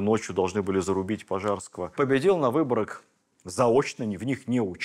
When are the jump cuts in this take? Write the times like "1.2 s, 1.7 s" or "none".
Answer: 1.9 s